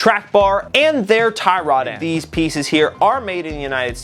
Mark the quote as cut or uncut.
cut